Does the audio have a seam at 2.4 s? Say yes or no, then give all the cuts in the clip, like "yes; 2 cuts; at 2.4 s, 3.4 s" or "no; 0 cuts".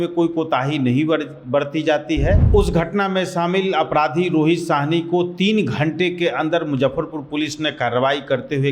yes; 1 cut; at 2.4 s